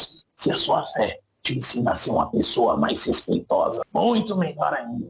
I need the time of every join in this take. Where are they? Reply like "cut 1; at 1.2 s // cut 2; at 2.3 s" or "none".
cut 1; at 3.8 s